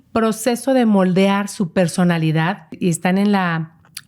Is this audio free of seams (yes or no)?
no